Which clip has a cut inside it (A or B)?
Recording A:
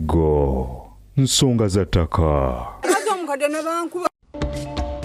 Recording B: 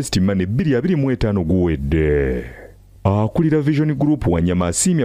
A